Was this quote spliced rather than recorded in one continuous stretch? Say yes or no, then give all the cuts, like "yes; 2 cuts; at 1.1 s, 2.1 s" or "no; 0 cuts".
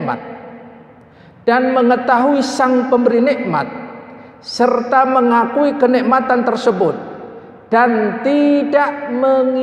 no; 0 cuts